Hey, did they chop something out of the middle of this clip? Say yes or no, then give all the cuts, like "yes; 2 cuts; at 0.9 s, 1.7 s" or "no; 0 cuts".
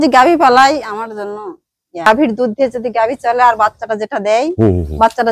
yes; 1 cut; at 2.1 s